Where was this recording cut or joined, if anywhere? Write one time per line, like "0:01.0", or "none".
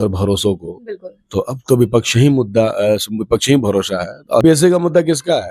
0:04.4